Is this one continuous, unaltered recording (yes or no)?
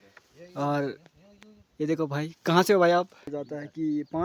no